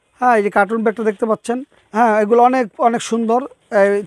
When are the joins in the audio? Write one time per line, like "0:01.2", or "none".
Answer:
0:01.8